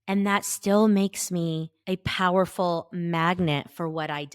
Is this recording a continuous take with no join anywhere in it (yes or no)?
no